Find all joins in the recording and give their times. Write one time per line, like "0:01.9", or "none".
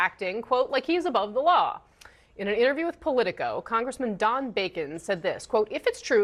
none